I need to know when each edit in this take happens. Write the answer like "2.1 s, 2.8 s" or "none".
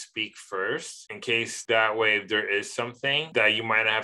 1.5 s